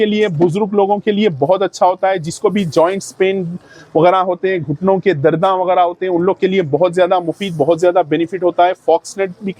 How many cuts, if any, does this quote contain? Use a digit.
0